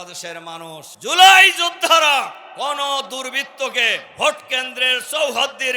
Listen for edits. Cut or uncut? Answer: cut